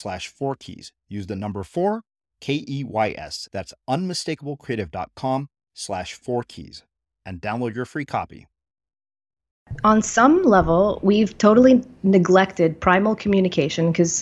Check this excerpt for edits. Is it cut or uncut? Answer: cut